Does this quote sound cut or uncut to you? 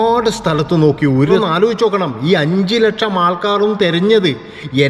cut